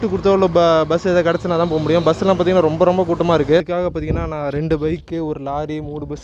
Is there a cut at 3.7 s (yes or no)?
yes